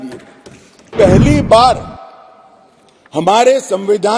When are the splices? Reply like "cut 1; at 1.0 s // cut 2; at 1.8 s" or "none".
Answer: cut 1; at 0.9 s